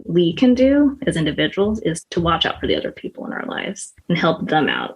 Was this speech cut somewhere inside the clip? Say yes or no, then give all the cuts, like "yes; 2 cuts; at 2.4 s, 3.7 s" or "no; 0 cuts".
yes; 2 cuts; at 2.0 s, 3.9 s